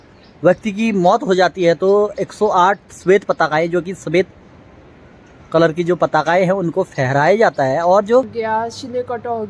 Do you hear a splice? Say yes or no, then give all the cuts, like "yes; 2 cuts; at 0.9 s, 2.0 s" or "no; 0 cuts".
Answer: yes; 1 cut; at 8.3 s